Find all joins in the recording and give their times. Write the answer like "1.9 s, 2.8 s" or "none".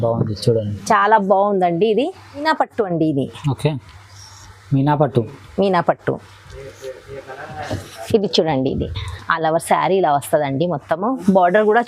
2.3 s